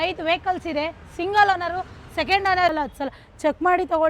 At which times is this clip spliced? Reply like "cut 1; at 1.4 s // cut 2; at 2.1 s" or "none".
cut 1; at 2.7 s